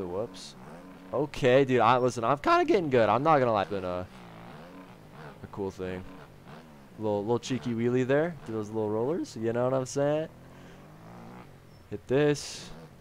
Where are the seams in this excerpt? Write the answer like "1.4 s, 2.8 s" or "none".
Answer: 3.7 s